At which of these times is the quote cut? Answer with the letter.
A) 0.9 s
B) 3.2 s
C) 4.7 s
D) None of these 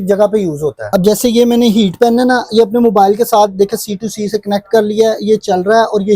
A